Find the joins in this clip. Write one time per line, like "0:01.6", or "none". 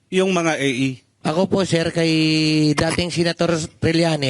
0:01.1